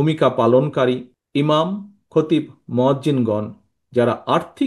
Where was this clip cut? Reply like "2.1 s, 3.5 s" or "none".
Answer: 1.1 s